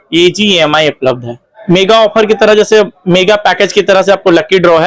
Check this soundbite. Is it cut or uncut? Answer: cut